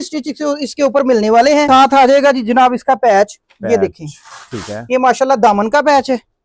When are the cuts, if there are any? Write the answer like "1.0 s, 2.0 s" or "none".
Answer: 1.7 s